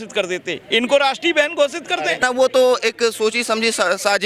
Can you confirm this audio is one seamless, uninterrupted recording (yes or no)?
no